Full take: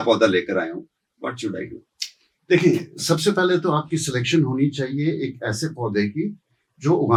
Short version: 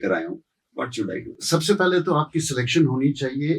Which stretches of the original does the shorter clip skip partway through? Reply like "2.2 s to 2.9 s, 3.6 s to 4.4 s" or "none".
1.8 s to 2.9 s